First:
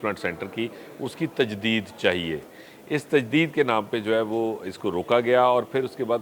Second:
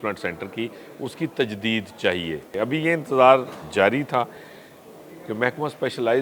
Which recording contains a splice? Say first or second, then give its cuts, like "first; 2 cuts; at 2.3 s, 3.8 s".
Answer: second; 1 cut; at 2.5 s